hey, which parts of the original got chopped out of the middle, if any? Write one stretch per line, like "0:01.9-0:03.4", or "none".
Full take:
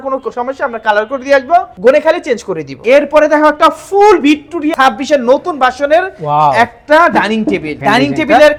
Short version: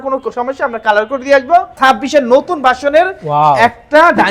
0:01.8-0:04.7